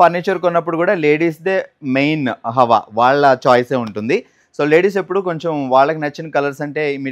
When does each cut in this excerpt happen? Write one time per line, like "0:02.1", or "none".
none

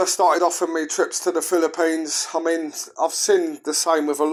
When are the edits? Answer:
none

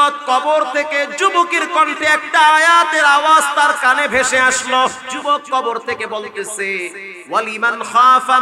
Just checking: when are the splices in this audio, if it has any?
0:05.1

